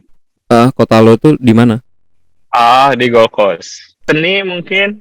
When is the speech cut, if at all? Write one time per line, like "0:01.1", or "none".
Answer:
0:04.0